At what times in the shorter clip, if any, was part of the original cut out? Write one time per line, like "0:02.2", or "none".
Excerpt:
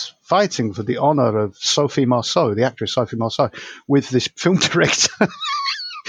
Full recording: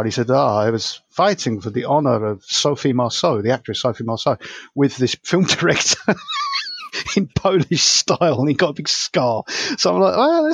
none